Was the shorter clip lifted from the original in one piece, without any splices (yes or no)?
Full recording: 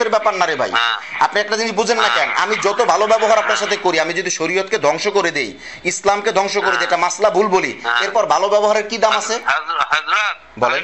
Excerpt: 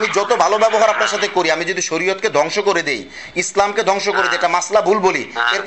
yes